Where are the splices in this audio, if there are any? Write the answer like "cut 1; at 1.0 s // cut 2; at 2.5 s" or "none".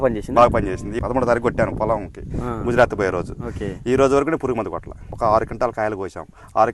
cut 1; at 1.0 s // cut 2; at 5.1 s

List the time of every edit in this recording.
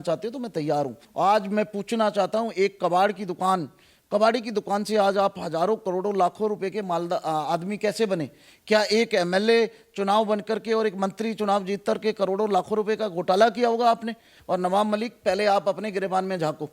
cut 1; at 1.0 s // cut 2; at 14.3 s

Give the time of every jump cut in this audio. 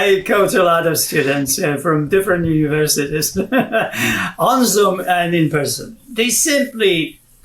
cut 1; at 6.0 s

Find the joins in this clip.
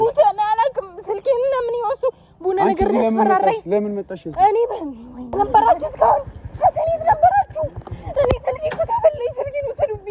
cut 1; at 5.3 s

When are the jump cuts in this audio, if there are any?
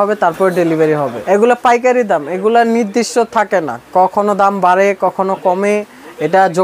cut 1; at 1.2 s

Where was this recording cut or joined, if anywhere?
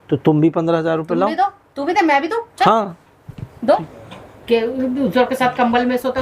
cut 1; at 3.8 s

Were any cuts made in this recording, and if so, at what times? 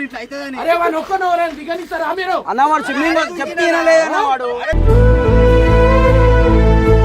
cut 1; at 4.8 s

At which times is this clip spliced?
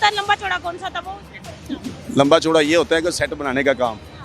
none

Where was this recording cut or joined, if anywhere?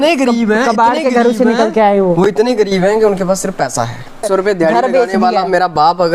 cut 1; at 4.2 s

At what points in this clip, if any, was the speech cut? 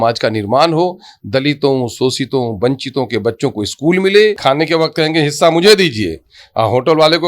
cut 1; at 4.4 s

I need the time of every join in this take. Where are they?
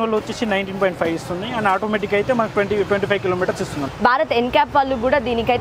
cut 1; at 3.9 s

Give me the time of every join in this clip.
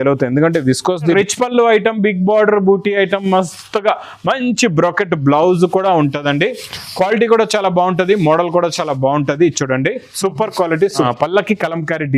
cut 1; at 1.1 s // cut 2; at 11.1 s

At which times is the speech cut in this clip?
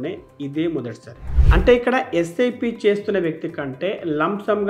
cut 1; at 1.4 s

